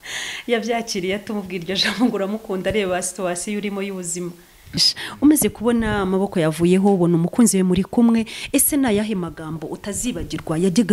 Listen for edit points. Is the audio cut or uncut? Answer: cut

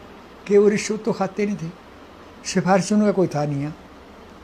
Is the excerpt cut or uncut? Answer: uncut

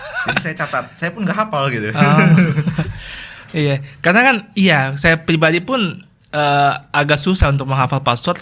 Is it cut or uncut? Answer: uncut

